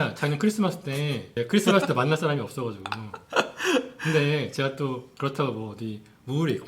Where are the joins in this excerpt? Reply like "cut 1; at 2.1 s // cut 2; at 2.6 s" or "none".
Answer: cut 1; at 1.3 s